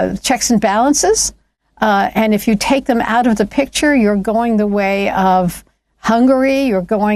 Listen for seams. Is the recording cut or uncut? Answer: uncut